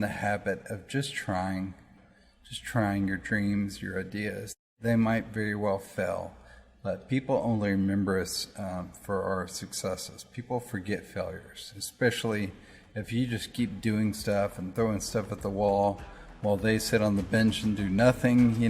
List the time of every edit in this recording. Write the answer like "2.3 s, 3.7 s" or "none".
1.9 s, 4.8 s